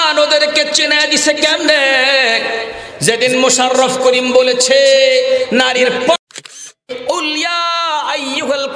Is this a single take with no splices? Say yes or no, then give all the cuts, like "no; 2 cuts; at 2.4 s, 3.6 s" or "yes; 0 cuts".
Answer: no; 1 cut; at 6.9 s